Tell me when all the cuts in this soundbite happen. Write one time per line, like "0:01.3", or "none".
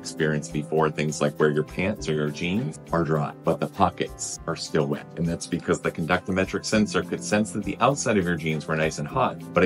none